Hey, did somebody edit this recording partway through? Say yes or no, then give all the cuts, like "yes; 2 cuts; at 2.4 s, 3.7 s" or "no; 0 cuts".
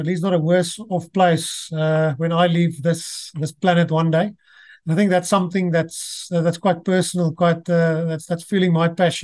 no; 0 cuts